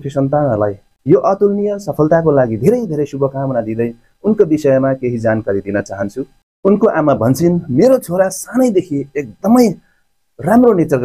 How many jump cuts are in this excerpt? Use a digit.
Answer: 0